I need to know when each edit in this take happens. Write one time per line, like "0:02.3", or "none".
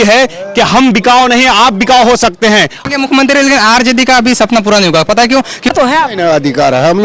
0:02.8
0:05.7